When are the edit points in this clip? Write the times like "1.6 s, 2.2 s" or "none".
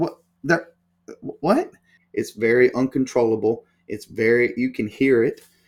2.0 s